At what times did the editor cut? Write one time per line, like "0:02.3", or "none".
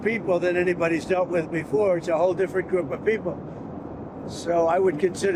none